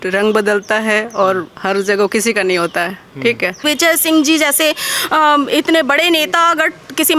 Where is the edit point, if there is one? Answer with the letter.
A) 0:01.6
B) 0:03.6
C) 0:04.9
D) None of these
B